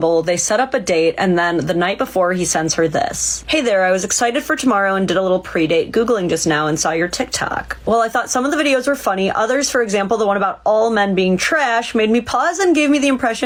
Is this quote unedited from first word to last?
yes; 0 cuts

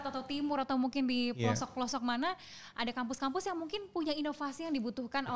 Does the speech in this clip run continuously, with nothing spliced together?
yes; 0 cuts

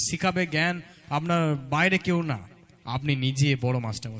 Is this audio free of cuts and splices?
yes; 0 cuts

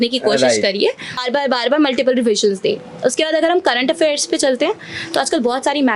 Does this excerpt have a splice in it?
yes; 1 cut; at 1.2 s

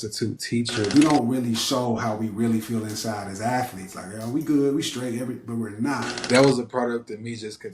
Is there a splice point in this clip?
yes; 2 cuts; at 0.9 s, 6.1 s

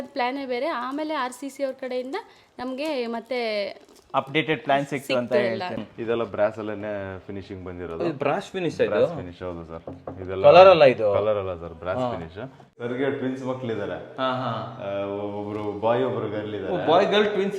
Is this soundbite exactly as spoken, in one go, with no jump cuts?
no; 2 cuts; at 5.8 s, 12.7 s

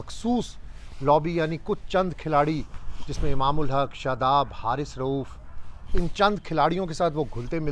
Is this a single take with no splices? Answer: yes; 0 cuts

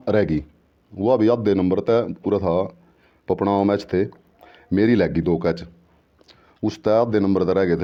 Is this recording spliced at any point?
no; 0 cuts

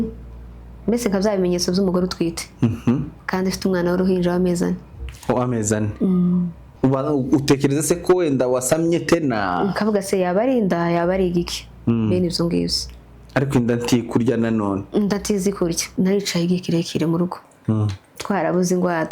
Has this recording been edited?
yes; 2 cuts; at 6.6 s, 15.8 s

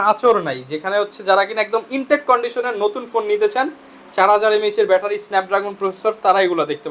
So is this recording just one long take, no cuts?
yes; 0 cuts

